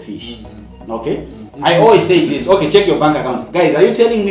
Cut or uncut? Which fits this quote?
cut